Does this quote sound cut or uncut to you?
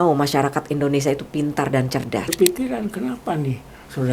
cut